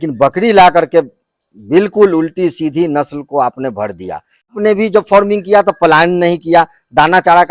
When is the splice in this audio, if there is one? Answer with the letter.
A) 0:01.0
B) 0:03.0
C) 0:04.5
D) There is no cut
C